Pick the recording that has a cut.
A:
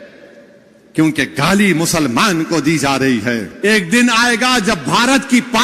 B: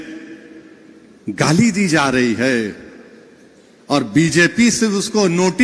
A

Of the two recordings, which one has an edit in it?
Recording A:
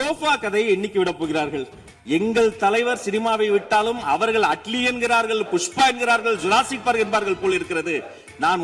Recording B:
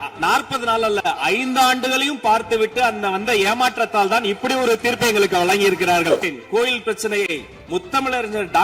B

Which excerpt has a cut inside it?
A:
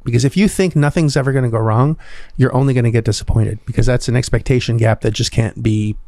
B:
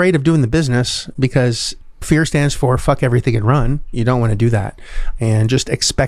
B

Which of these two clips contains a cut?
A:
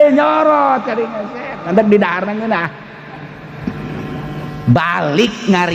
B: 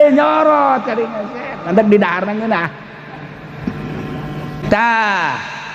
B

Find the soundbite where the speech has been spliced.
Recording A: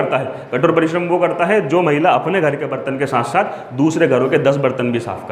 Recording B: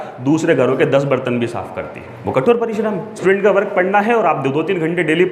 B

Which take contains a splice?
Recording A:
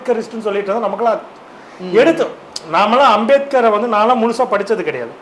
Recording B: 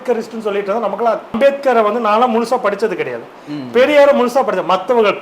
B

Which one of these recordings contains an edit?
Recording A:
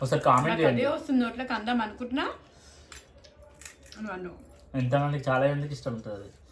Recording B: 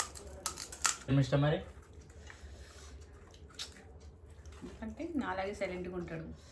B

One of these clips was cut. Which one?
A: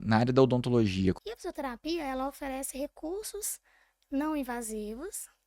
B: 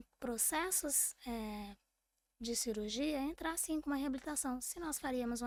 A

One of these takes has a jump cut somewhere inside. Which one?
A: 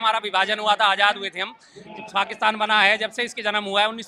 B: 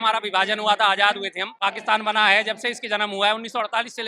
B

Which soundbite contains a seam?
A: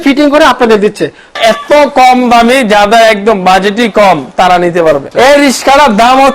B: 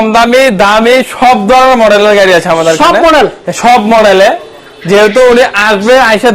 A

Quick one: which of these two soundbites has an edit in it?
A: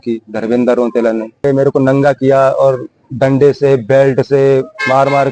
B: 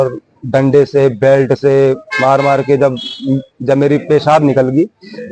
A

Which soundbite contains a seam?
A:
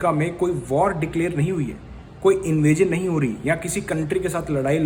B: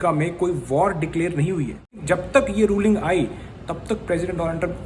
B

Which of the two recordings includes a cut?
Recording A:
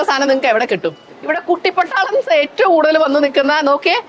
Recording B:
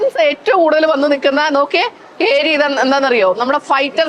A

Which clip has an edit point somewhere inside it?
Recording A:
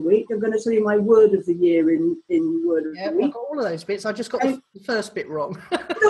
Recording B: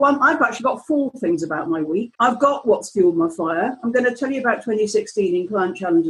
B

